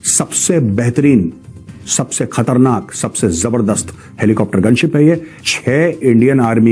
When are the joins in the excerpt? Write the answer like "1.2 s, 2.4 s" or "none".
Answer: 5.4 s